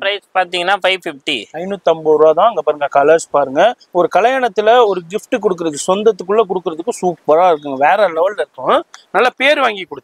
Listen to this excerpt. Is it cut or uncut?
uncut